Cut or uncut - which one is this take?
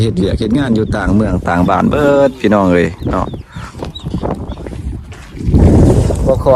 uncut